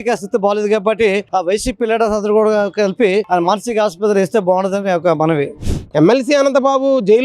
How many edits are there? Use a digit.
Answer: 1